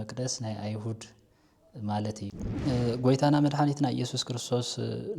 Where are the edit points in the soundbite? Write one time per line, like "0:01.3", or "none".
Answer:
0:02.4